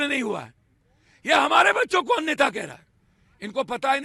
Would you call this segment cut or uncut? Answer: uncut